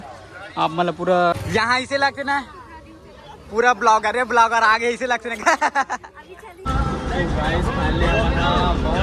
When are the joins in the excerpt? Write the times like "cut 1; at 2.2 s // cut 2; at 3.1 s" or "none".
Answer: cut 1; at 1.4 s // cut 2; at 6.7 s

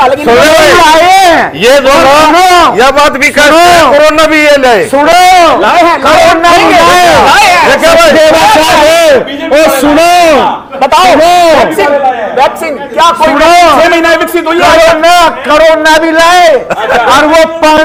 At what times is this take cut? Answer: none

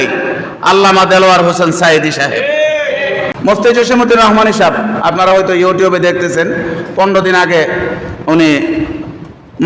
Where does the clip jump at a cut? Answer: cut 1; at 3.3 s

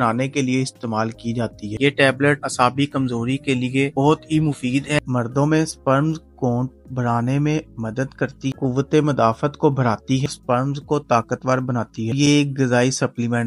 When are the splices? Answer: cut 1; at 1.7 s // cut 2; at 5.0 s // cut 3; at 8.4 s // cut 4; at 10.2 s // cut 5; at 12.1 s

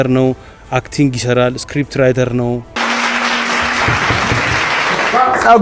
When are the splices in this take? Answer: cut 1; at 2.7 s

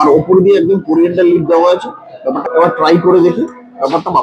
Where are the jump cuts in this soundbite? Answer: cut 1; at 2.5 s

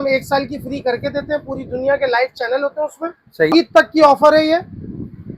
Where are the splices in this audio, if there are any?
cut 1; at 3.5 s

